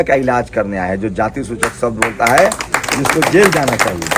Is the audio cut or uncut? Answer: uncut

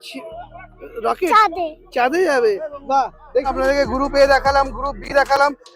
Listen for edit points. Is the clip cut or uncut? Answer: cut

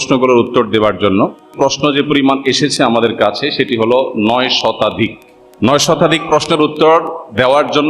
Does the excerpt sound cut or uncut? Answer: cut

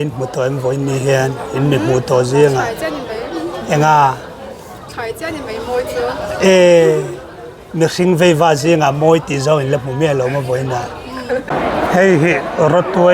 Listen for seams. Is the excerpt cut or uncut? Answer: cut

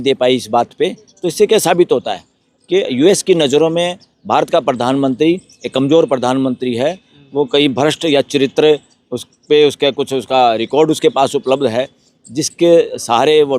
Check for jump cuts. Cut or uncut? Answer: uncut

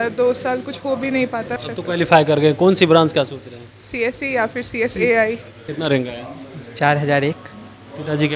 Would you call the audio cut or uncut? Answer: cut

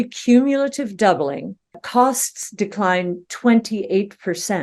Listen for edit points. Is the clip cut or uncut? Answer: uncut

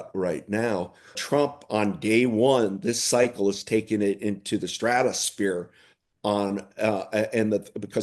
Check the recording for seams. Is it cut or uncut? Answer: cut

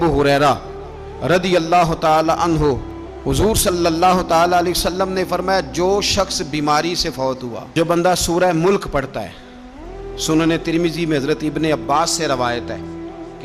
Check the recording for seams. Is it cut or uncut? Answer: cut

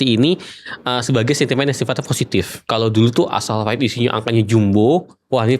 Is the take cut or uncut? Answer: cut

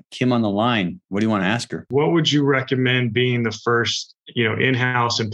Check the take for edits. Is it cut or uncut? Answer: cut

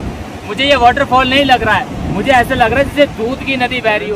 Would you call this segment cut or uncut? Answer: uncut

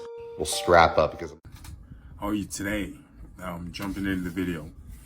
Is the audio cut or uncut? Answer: cut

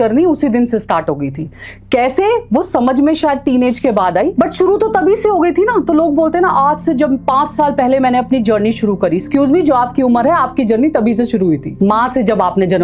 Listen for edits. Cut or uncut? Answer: uncut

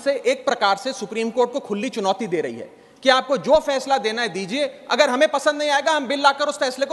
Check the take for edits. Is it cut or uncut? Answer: uncut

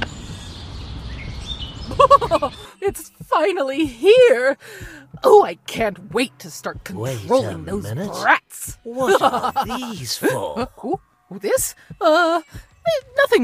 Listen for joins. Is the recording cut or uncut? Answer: cut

